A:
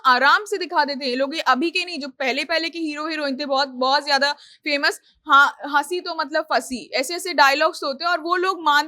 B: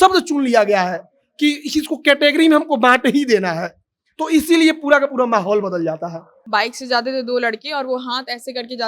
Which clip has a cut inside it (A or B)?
B